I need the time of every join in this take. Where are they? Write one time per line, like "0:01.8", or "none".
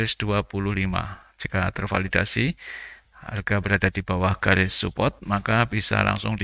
none